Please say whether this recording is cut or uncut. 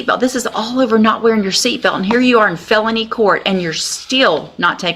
uncut